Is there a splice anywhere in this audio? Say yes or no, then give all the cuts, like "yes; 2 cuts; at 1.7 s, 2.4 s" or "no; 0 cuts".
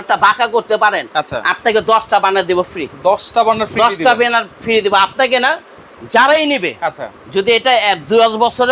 no; 0 cuts